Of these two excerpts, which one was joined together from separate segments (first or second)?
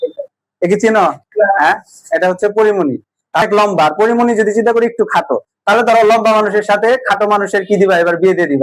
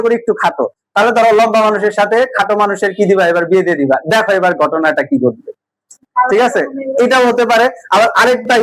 first